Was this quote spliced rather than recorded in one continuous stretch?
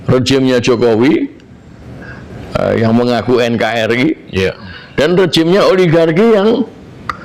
no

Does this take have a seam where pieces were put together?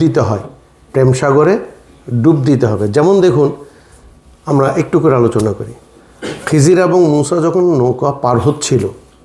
no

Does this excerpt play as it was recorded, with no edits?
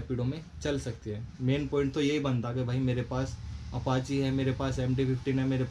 yes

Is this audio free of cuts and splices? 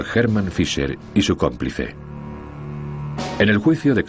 no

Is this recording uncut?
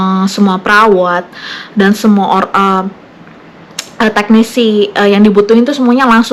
yes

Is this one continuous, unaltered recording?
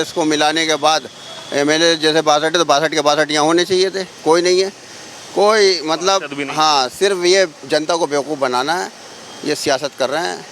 yes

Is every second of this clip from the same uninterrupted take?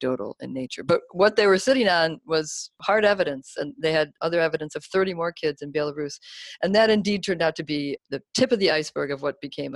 no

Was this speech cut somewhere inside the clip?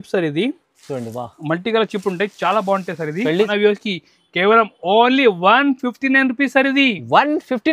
yes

